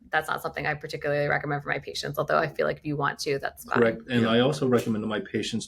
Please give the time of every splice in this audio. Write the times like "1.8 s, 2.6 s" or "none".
3.6 s